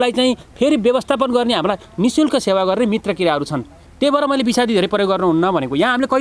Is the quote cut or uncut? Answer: uncut